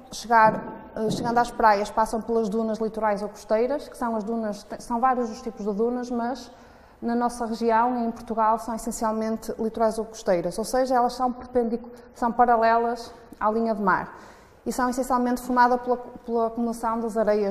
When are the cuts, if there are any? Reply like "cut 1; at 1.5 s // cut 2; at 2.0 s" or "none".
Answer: cut 1; at 5.5 s